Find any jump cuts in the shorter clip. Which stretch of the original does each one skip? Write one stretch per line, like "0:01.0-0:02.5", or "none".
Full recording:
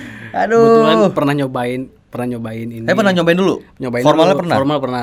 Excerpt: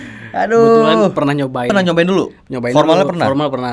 0:01.7-0:03.0